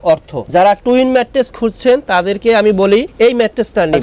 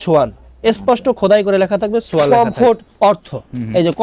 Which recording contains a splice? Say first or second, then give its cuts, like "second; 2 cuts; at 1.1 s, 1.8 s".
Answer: second; 1 cut; at 2.3 s